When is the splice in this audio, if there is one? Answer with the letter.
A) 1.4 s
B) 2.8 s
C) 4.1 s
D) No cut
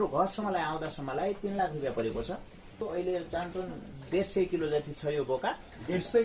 B